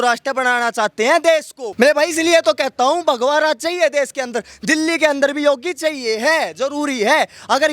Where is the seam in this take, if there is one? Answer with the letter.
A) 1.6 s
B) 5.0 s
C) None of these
A